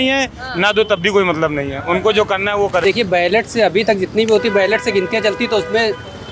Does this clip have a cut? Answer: yes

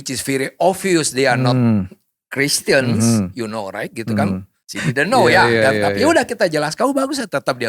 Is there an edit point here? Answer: yes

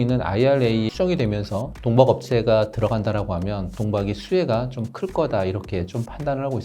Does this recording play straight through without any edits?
no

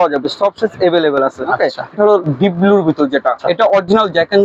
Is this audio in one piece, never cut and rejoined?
no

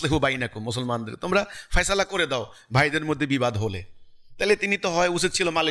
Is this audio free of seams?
yes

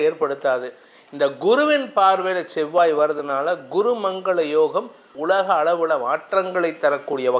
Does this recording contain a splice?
yes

